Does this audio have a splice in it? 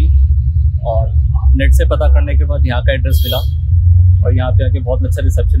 no; 0 cuts

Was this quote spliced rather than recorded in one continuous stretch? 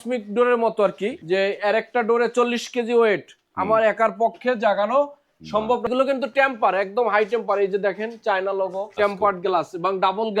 yes; 3 cuts; at 1.2 s, 5.9 s, 9.0 s

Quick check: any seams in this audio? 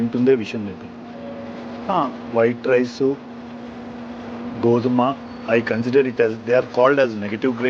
no; 0 cuts

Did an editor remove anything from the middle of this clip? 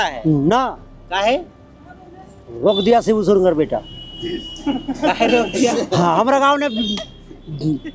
no; 0 cuts

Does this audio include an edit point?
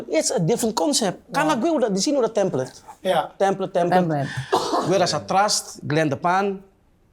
no; 0 cuts

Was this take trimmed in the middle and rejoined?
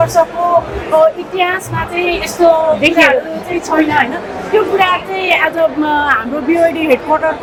no; 0 cuts

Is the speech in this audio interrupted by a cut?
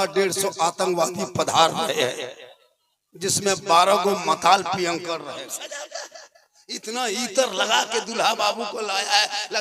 yes; 1 cut; at 5.4 s

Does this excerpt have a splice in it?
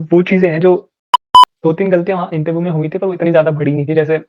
yes; 1 cut; at 1.4 s

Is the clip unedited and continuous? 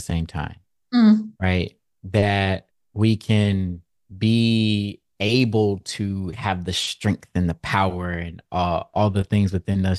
no; 1 cut; at 8.9 s

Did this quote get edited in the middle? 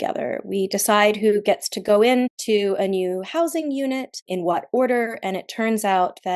yes; 2 cuts; at 2.4 s, 4.3 s

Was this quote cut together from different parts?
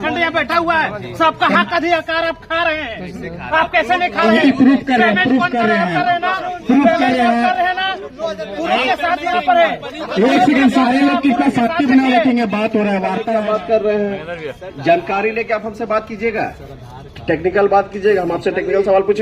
yes; 1 cut; at 13.3 s

